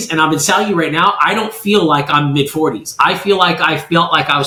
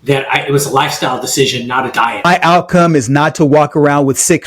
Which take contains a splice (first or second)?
second